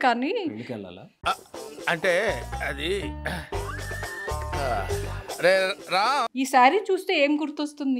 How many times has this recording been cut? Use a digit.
1